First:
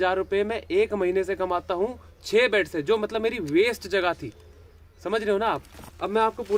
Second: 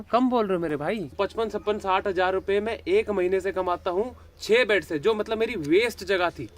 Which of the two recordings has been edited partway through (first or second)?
second